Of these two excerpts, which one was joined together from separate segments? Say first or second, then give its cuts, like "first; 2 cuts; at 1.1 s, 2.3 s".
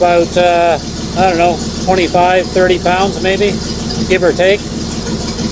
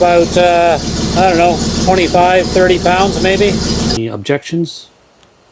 second; 1 cut; at 4.0 s